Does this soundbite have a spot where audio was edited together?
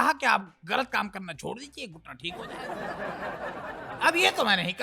yes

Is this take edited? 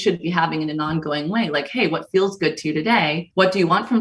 no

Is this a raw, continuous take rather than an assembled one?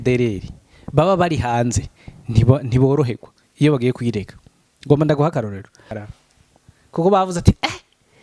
no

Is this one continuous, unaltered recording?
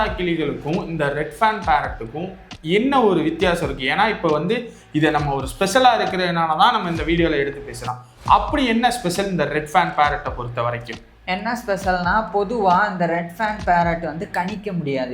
yes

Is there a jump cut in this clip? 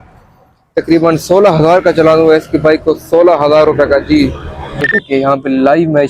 yes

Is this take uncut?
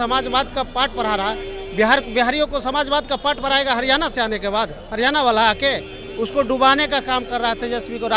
yes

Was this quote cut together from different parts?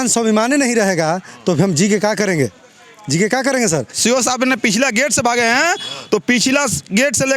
yes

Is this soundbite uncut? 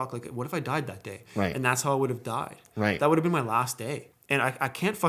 no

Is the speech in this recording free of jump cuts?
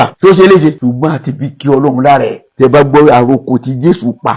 no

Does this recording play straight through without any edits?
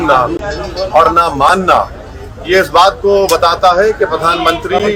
yes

